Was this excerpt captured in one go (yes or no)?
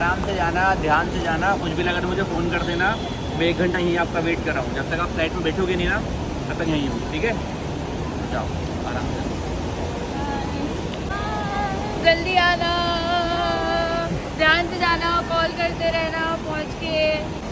yes